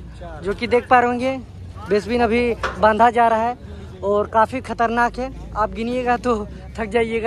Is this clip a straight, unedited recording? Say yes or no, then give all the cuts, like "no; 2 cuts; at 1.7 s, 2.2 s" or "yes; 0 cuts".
yes; 0 cuts